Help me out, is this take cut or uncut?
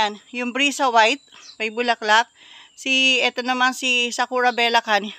uncut